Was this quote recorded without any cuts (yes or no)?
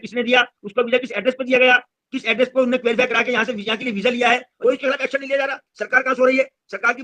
no